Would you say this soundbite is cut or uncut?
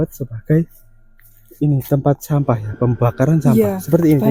uncut